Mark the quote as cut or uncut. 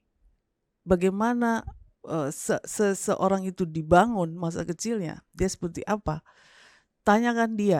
uncut